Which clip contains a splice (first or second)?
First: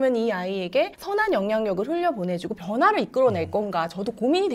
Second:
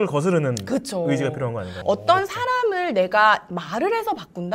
second